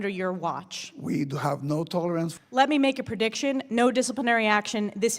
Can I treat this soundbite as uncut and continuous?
no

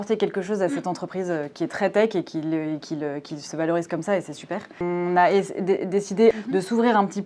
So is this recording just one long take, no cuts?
no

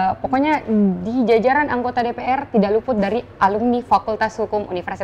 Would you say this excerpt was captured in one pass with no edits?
yes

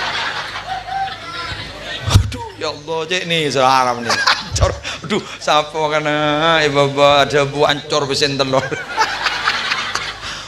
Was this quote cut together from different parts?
yes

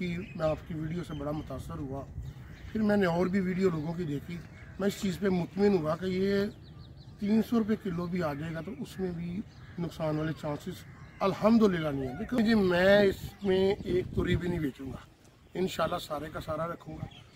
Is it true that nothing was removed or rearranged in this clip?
no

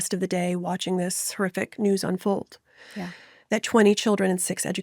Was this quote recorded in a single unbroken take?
yes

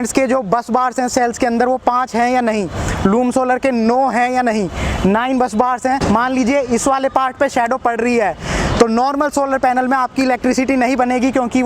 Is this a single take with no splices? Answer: no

